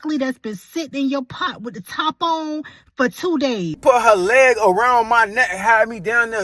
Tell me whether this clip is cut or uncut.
cut